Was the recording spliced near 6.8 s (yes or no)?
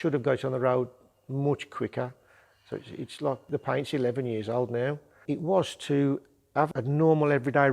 yes